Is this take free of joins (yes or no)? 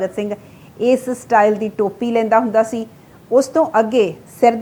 yes